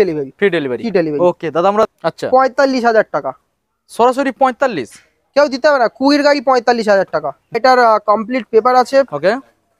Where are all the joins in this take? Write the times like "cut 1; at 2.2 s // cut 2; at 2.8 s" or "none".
cut 1; at 1.9 s // cut 2; at 7.6 s